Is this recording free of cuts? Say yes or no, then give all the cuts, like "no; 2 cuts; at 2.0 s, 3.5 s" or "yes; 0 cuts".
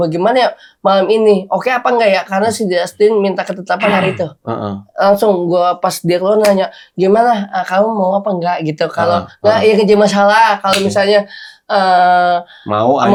yes; 0 cuts